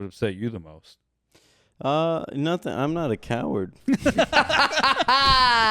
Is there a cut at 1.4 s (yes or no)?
no